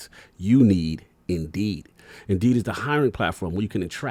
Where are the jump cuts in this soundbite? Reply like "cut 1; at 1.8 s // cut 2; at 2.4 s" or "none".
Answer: none